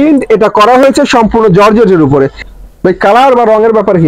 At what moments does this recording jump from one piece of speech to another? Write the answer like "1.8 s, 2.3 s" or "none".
2.4 s

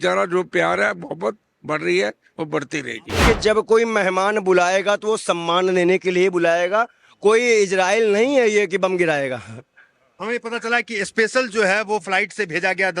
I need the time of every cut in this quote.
3.2 s

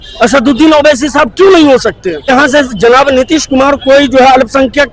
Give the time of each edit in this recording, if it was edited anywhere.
2.3 s

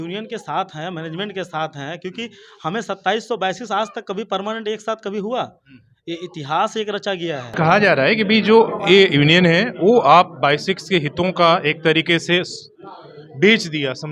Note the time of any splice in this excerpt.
7.5 s

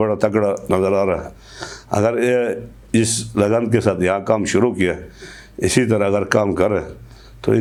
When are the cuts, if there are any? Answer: none

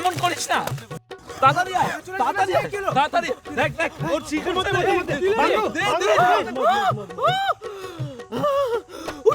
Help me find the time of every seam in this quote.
1.0 s

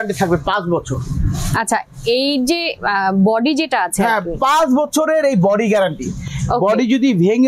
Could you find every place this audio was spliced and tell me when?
none

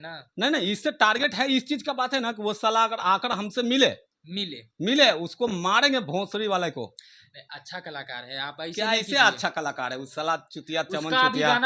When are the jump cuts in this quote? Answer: none

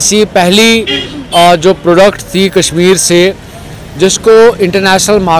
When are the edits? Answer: none

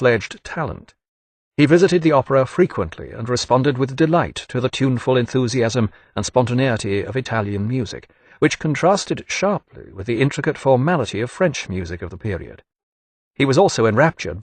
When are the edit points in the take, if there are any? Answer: 11.4 s

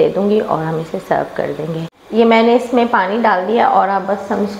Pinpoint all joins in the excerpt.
2.0 s

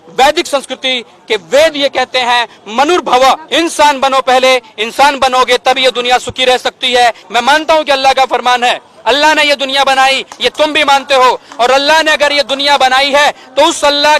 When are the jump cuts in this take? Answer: 3.4 s, 7.2 s

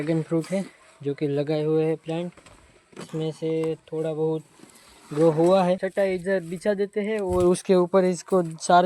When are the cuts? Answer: 5.8 s

